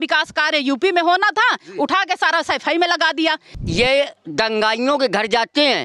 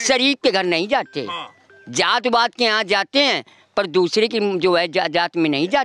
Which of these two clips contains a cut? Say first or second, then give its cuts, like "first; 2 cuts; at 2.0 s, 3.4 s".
first; 1 cut; at 3.5 s